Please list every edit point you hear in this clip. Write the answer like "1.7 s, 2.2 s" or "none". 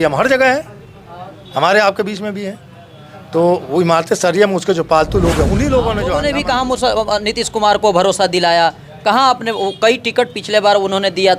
6.2 s

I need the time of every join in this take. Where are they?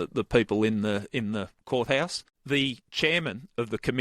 2.3 s

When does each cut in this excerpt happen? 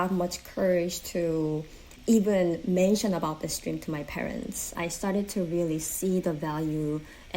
1.9 s, 4.8 s

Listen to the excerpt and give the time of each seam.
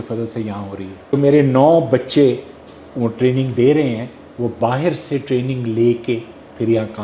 1.1 s

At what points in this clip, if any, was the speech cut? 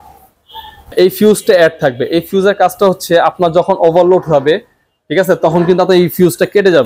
0.9 s

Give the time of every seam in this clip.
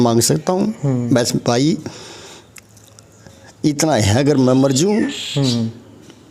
none

